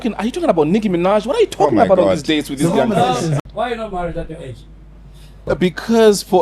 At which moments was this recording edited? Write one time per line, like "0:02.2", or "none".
0:03.4
0:05.4